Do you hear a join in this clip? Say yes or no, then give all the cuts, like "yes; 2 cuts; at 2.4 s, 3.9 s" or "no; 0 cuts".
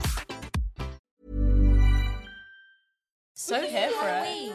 yes; 2 cuts; at 1.0 s, 3.3 s